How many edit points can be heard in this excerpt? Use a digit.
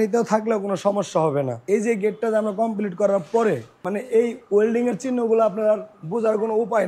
2